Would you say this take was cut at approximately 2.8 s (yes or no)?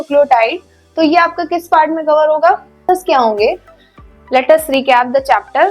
yes